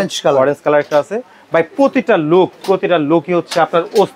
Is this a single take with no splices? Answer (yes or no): yes